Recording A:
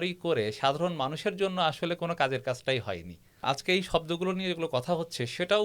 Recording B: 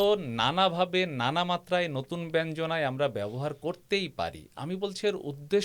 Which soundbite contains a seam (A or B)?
A